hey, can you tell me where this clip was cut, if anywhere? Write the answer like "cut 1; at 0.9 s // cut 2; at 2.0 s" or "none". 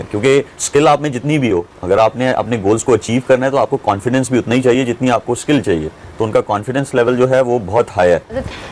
none